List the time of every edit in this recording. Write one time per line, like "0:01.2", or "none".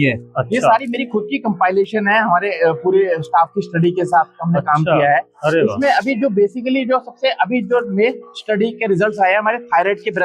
none